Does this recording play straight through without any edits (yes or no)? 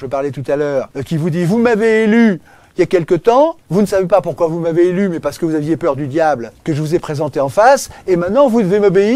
no